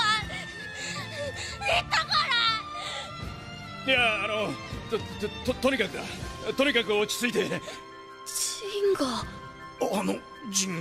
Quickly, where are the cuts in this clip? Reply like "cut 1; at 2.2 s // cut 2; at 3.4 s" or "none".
none